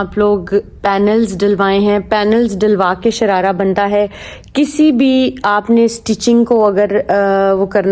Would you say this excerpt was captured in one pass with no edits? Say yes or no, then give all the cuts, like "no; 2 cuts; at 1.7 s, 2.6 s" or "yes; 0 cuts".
yes; 0 cuts